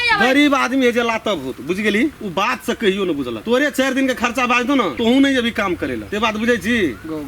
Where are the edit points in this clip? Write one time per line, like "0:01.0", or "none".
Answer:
0:02.2
0:03.4
0:04.9
0:06.0